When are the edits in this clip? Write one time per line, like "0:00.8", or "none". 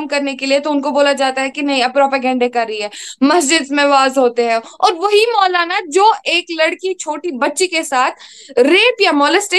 none